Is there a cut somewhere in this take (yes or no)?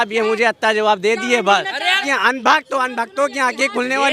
yes